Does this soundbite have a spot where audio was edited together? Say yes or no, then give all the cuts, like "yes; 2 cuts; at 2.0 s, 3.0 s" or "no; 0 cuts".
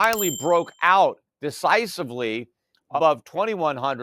yes; 1 cut; at 2.9 s